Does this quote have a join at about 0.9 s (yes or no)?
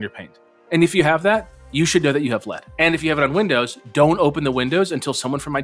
no